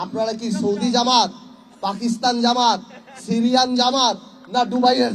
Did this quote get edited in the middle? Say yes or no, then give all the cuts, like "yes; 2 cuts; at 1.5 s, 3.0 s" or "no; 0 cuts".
no; 0 cuts